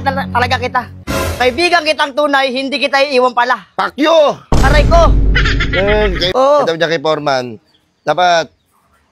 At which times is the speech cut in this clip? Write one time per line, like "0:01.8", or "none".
0:06.2

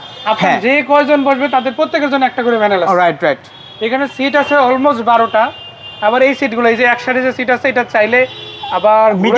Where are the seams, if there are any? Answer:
none

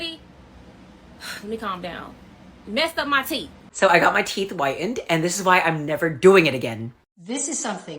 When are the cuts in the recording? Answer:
0:03.6
0:07.1

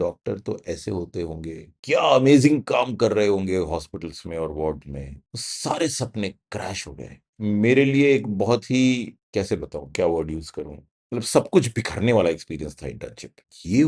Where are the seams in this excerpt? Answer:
0:01.7

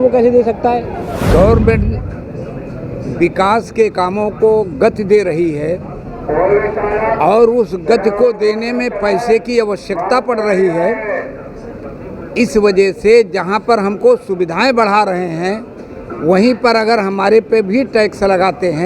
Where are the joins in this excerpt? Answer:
0:01.2

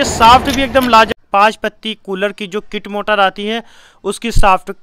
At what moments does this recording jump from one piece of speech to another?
0:01.1

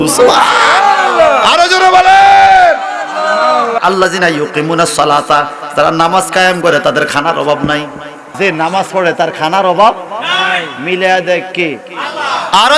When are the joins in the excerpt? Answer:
0:03.8
0:08.3

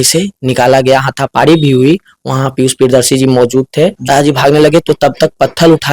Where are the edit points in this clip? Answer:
0:04.0

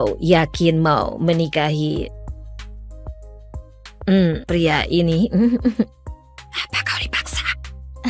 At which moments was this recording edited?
0:02.1
0:03.7

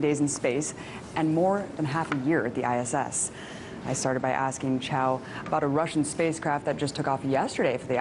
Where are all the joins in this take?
0:06.6

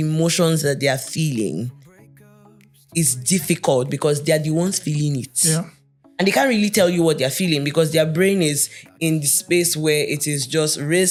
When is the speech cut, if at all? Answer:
none

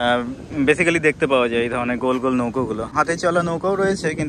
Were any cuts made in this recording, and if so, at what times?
0:02.9

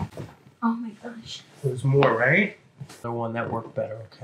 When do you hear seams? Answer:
0:03.0

